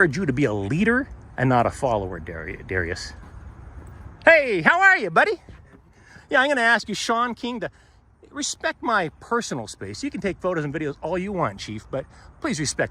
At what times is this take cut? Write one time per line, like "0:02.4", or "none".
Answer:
none

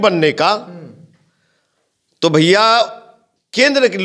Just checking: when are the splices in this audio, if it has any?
none

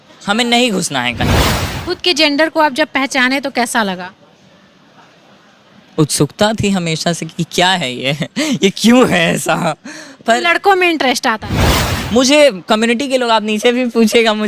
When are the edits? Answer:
0:01.7
0:11.9

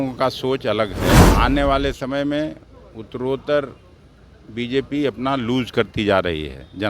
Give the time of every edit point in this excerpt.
0:01.2

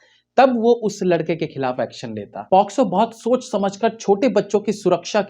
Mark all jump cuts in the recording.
0:02.4

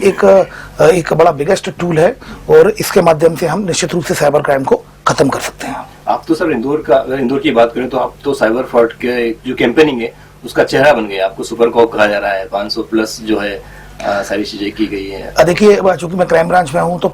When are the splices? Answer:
none

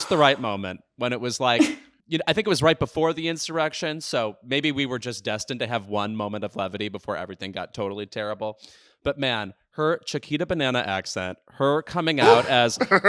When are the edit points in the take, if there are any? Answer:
none

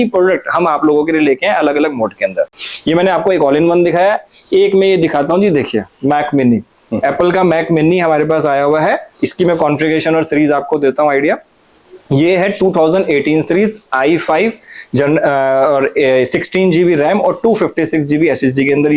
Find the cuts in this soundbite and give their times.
none

